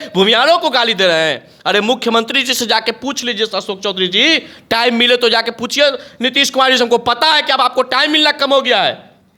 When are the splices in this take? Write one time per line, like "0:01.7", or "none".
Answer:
none

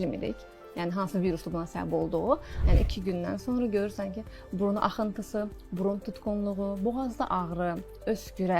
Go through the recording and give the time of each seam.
0:02.5

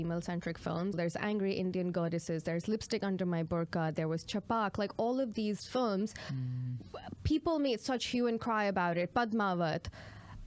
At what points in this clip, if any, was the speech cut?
0:01.0

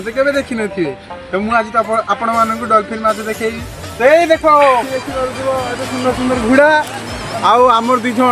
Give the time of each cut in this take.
0:04.9

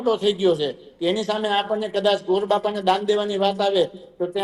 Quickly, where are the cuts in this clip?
none

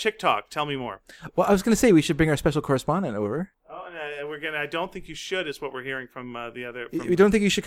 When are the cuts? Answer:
none

